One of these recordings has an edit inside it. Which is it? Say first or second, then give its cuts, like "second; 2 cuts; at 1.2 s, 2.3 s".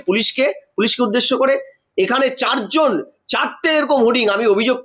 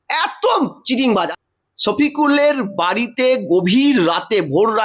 second; 1 cut; at 1.3 s